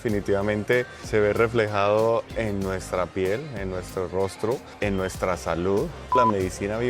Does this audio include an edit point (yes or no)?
yes